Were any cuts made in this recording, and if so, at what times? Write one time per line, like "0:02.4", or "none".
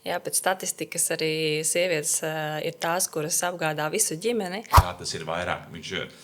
0:04.7